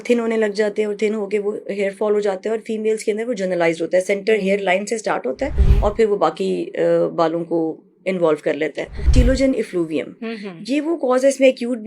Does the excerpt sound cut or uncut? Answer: cut